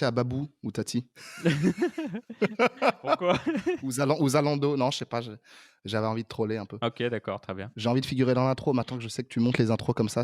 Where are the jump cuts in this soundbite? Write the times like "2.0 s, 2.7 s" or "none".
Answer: 7.7 s